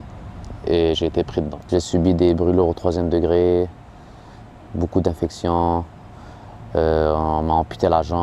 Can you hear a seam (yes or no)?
yes